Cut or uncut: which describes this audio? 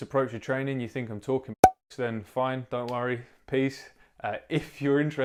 uncut